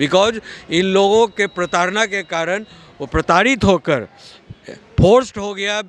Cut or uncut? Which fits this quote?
uncut